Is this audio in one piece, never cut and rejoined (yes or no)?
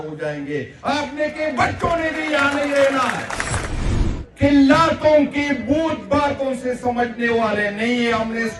no